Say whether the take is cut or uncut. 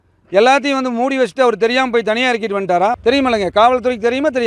cut